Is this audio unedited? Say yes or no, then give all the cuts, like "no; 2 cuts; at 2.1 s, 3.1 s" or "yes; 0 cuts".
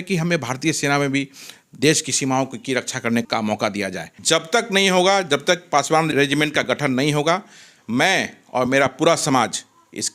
no; 3 cuts; at 3.3 s, 4.1 s, 6.1 s